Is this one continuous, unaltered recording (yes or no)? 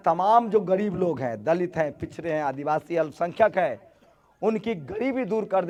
yes